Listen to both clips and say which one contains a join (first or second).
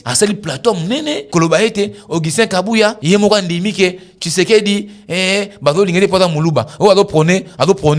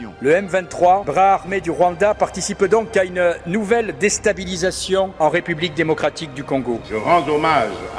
first